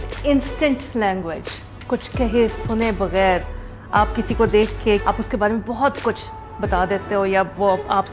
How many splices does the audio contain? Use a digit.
1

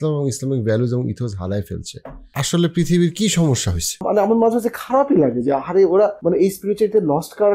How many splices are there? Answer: 3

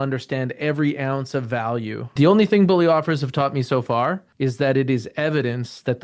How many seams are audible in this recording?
2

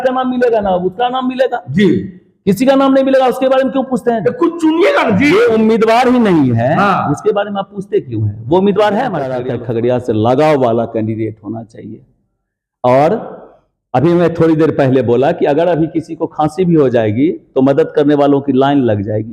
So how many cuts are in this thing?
1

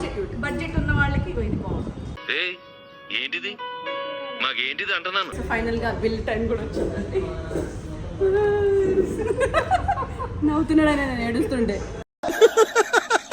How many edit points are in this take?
1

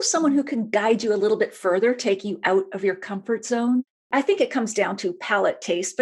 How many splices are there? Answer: 1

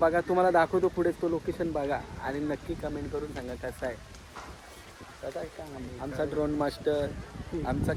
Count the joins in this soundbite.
0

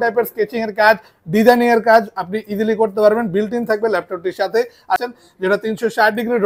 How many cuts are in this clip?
1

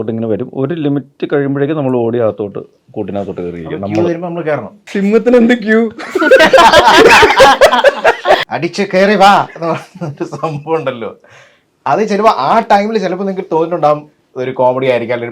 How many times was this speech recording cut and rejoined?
2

